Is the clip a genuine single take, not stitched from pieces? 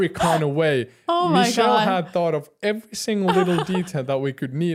yes; 0 cuts

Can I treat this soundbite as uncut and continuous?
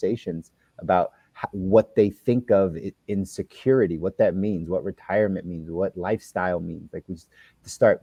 yes; 0 cuts

